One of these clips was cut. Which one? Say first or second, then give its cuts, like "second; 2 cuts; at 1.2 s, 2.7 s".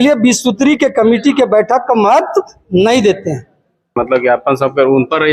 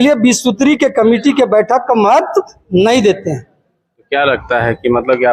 first; 1 cut; at 4.0 s